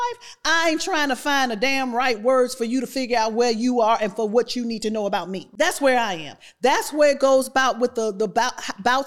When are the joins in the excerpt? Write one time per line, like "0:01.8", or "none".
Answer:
0:05.4